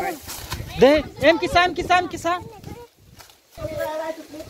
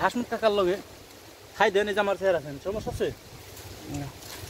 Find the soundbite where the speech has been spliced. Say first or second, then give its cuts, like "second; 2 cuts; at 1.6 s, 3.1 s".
first; 1 cut; at 3.6 s